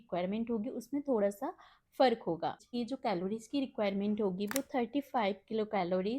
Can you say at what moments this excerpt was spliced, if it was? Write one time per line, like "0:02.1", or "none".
0:02.8